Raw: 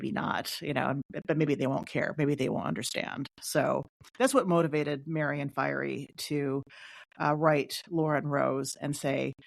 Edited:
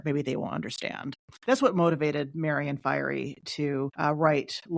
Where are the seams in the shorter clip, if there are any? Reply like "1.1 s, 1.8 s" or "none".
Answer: 1.2 s, 3.9 s